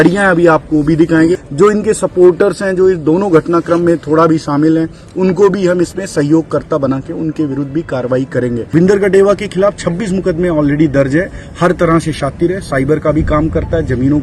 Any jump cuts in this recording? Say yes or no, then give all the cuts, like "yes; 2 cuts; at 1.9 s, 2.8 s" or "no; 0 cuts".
yes; 2 cuts; at 1.4 s, 8.7 s